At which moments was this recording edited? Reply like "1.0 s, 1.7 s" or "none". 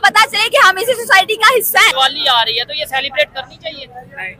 1.9 s

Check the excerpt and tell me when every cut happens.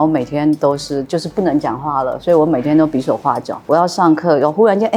none

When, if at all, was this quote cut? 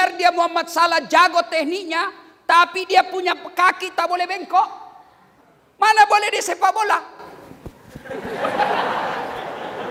none

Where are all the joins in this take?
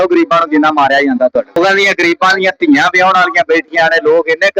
1.6 s

